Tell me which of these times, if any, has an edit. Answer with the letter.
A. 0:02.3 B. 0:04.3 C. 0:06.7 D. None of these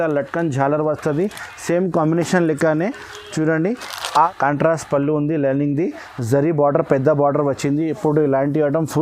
B